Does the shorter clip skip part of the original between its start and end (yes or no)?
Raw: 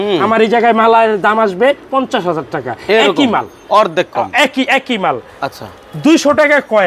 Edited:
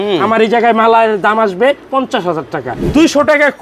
yes